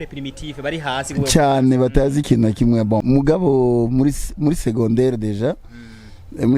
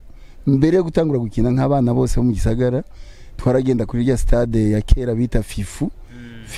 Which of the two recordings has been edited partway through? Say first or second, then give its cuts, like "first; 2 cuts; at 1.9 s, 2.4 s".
first; 1 cut; at 3.0 s